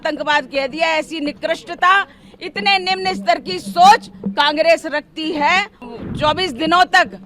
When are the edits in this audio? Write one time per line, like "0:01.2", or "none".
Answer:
0:05.8